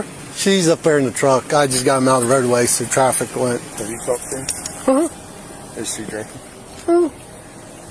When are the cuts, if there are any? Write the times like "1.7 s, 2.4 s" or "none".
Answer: none